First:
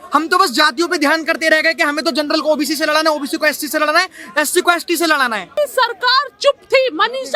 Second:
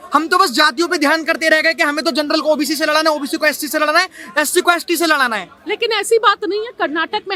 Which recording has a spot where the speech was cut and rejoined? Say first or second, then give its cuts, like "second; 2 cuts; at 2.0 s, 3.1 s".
first; 1 cut; at 5.6 s